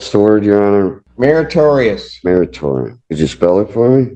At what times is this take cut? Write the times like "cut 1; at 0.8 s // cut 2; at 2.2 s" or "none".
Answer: cut 1; at 1.0 s // cut 2; at 3.0 s